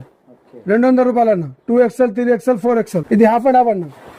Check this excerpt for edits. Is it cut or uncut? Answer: uncut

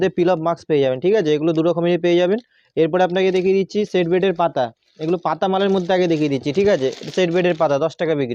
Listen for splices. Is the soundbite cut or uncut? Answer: uncut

